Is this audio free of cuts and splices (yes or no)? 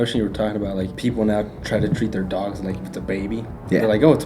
no